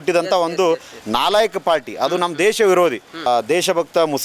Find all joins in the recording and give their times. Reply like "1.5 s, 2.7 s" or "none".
3.3 s